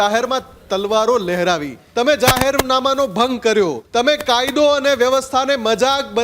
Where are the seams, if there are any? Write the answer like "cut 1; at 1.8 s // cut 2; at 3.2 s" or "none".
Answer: cut 1; at 1.8 s // cut 2; at 3.8 s